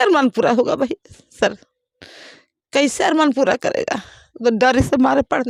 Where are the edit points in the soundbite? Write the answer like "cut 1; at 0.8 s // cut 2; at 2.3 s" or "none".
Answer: none